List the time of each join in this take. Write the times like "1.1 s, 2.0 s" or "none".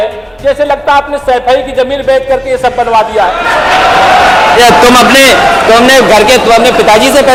none